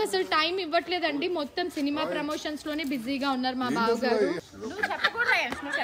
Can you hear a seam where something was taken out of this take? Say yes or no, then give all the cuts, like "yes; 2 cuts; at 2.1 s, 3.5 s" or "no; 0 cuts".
yes; 1 cut; at 4.4 s